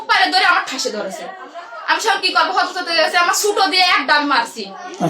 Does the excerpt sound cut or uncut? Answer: uncut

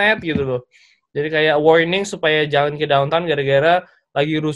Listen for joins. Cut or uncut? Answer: uncut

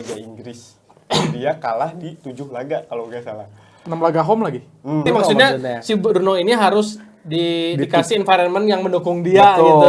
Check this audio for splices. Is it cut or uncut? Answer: cut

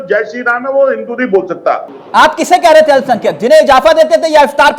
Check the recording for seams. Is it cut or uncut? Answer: cut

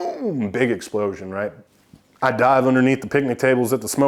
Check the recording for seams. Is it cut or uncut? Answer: cut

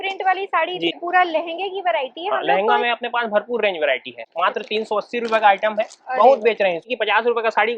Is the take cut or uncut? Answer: cut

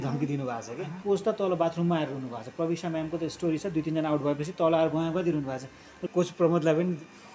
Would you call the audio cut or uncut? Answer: cut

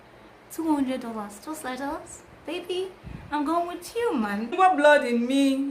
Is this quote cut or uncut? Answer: cut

